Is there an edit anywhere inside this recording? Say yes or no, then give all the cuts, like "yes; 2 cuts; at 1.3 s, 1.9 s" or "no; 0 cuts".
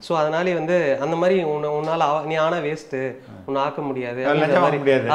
no; 0 cuts